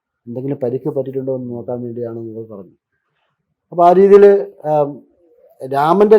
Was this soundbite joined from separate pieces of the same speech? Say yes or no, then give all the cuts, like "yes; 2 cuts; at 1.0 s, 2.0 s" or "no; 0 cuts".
no; 0 cuts